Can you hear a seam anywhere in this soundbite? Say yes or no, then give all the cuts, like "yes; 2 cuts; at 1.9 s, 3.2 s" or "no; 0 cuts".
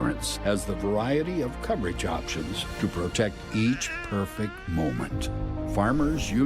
no; 0 cuts